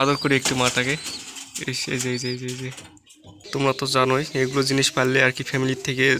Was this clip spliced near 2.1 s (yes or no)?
no